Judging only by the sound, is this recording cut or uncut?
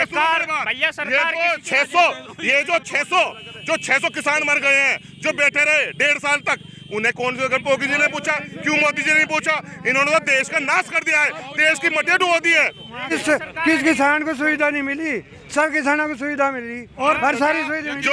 cut